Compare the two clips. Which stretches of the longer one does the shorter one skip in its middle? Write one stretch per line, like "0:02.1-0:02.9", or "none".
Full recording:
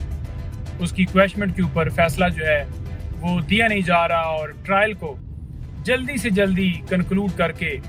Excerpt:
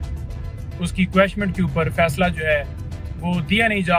none